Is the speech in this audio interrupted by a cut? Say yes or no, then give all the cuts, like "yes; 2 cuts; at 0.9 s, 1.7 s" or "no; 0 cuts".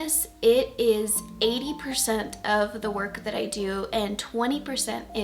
no; 0 cuts